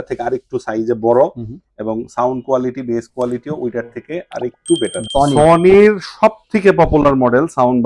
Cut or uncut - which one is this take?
cut